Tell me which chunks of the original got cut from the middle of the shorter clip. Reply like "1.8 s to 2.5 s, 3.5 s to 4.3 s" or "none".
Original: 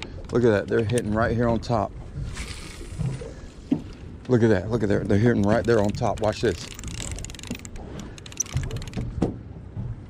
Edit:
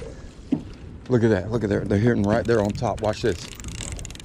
none

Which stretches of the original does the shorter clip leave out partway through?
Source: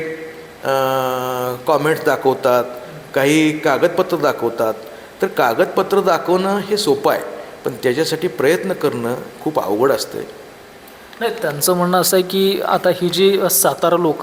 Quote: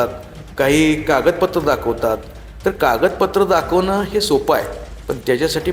none

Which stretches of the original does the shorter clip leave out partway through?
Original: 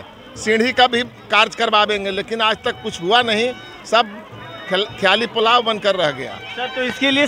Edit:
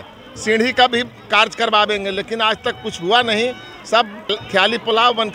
4.4 s to 4.9 s

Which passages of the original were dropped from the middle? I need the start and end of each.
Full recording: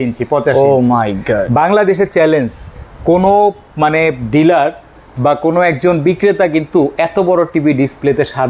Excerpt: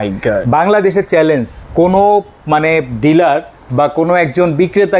2.6 s to 2.9 s, 4.9 s to 5.0 s

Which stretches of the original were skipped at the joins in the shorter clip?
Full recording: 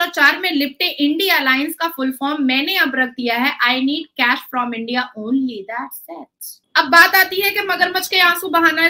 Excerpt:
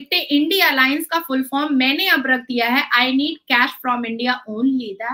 none

